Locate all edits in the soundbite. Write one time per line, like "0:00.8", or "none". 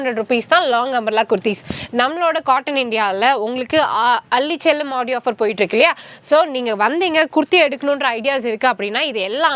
none